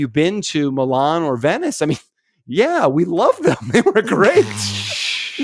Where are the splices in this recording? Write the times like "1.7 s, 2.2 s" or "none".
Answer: none